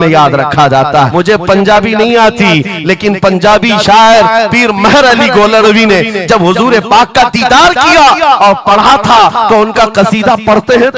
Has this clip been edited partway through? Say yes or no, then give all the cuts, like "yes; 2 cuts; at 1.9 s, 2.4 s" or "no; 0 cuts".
yes; 1 cut; at 1.1 s